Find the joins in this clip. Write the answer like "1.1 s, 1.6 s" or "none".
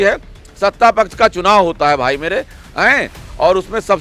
none